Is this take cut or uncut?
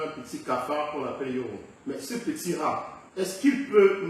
cut